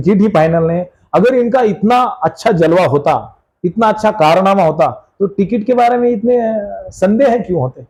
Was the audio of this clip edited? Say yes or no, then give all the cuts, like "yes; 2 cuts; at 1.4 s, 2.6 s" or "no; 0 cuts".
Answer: no; 0 cuts